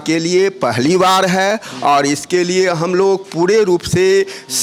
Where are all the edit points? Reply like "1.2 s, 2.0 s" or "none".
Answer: none